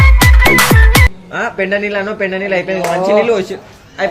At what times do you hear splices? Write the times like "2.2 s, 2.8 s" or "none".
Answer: 1.1 s